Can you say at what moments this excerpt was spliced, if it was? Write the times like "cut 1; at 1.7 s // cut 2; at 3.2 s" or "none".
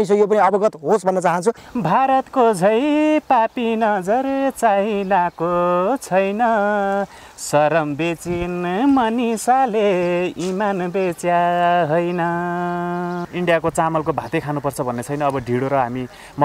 cut 1; at 1.7 s // cut 2; at 13.3 s